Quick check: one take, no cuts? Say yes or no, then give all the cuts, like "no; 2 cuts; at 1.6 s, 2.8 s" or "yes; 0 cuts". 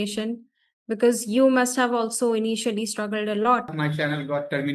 no; 1 cut; at 3.7 s